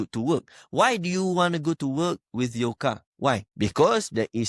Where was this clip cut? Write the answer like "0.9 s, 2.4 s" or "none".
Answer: 3.2 s

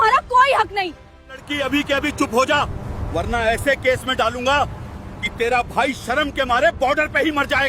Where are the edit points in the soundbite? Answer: 1.4 s

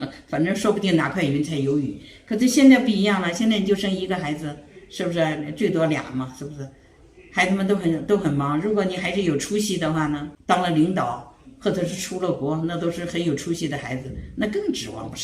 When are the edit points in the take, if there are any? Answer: 10.3 s

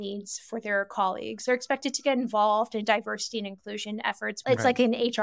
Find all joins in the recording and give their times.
1.4 s, 4.3 s

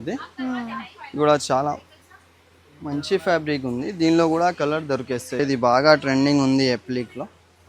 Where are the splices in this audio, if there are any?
5.4 s

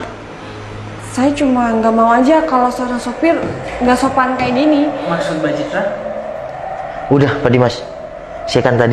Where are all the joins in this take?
none

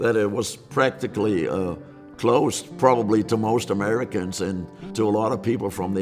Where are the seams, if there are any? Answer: 4.8 s

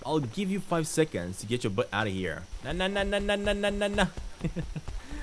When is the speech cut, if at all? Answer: 2.5 s

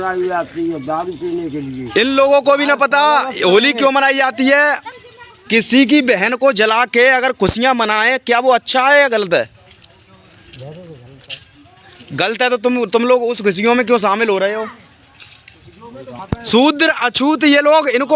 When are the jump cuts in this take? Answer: 1.9 s, 4.8 s, 16.1 s

